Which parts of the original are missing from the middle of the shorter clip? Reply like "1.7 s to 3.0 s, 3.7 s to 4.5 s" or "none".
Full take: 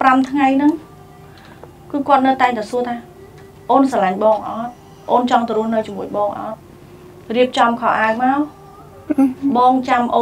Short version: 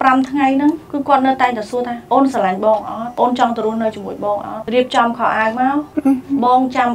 0.8 s to 1.8 s, 3.0 s to 3.6 s, 4.6 s to 4.9 s, 6.5 s to 7.2 s, 8.5 s to 9.0 s